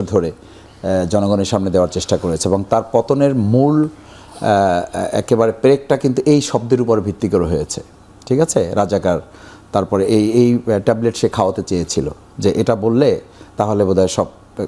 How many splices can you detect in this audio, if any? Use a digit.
0